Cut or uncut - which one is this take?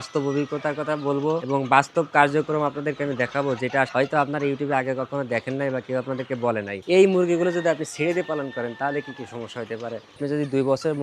cut